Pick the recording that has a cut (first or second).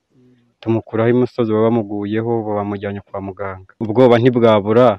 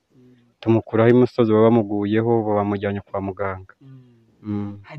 first